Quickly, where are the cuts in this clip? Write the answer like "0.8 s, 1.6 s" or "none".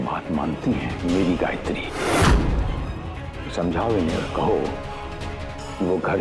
none